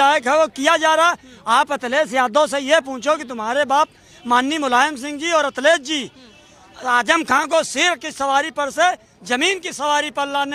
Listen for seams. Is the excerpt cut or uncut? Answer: uncut